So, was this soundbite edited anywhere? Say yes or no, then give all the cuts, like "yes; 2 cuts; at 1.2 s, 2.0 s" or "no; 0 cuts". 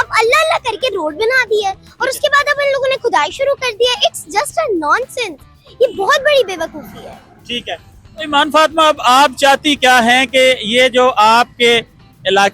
no; 0 cuts